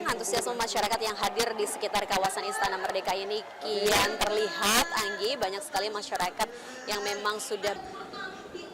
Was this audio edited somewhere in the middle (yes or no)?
yes